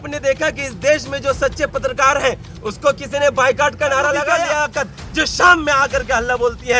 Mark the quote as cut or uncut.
cut